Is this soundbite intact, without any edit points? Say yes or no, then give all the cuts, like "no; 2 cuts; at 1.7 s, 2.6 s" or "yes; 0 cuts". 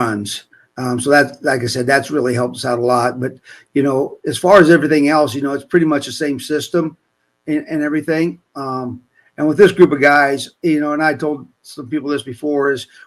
yes; 0 cuts